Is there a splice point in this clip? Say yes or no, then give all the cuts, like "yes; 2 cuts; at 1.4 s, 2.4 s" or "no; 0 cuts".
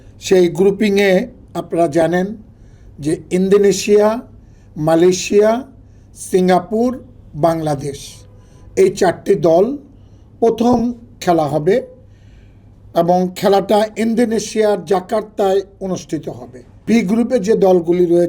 yes; 1 cut; at 16.8 s